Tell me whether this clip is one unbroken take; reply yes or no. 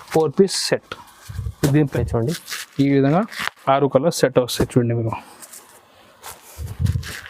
no